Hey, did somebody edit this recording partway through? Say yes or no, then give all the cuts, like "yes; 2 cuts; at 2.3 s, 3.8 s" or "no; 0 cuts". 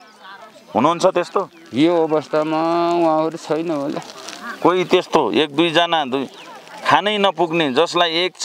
no; 0 cuts